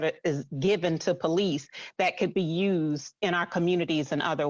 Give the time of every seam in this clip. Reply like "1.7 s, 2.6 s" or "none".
3.1 s